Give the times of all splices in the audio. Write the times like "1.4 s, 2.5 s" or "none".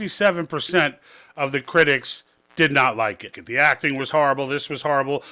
3.4 s